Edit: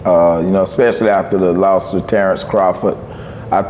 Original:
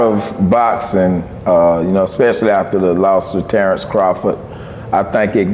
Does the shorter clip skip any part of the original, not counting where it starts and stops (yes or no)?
no